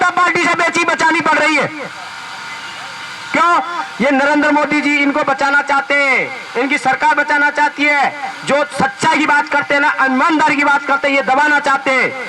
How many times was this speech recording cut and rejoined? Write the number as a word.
zero